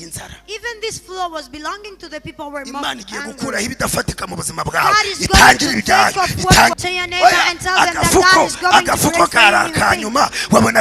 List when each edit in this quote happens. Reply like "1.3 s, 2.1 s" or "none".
6.8 s